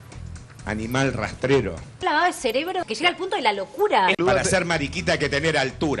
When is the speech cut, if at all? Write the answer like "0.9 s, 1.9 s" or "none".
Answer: none

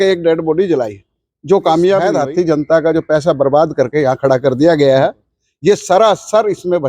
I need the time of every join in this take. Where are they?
2.1 s

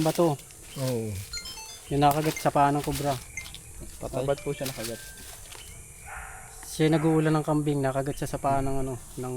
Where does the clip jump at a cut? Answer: none

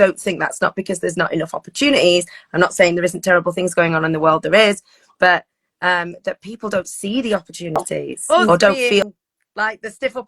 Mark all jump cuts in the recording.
9.0 s

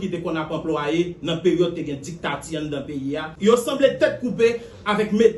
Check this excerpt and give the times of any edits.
3.2 s

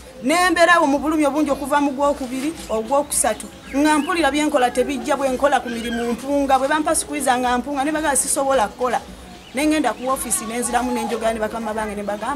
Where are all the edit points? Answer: none

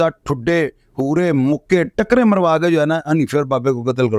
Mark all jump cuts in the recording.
none

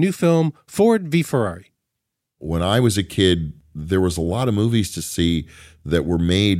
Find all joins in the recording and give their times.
2.1 s

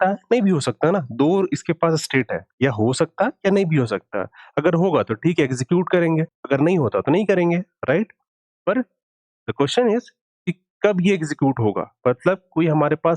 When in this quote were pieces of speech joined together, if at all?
6.3 s

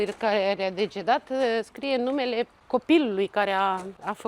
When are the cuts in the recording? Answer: none

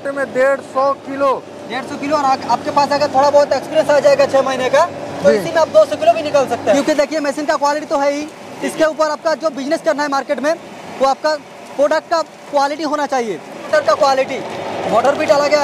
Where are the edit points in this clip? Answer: 6.8 s, 13.6 s

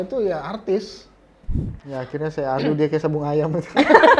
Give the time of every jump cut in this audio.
1.7 s

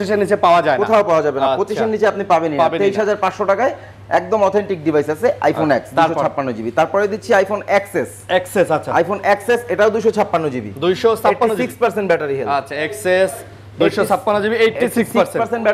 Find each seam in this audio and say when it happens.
none

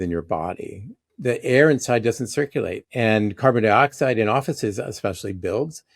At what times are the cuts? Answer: 1.1 s, 2.8 s

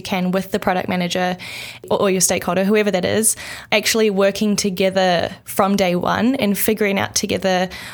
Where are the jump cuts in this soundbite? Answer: 1.8 s, 3.6 s

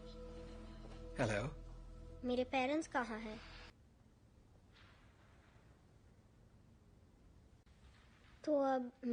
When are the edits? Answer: 3.7 s

